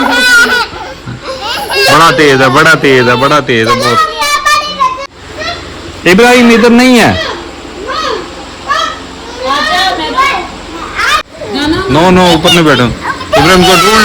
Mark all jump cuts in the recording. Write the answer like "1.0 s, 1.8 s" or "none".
5.1 s, 11.3 s